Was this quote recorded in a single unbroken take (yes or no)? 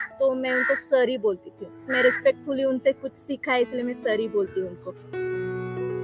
yes